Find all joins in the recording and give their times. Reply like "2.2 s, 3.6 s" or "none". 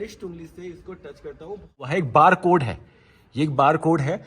1.9 s